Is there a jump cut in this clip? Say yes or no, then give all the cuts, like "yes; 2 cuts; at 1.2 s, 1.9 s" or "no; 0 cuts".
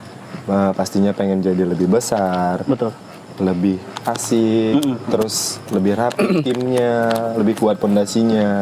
no; 0 cuts